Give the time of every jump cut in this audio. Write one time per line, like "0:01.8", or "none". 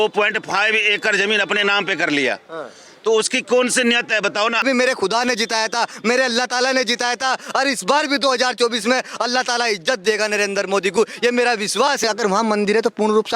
0:04.6
0:12.0